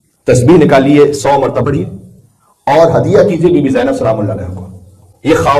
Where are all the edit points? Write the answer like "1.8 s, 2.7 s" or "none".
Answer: 1.6 s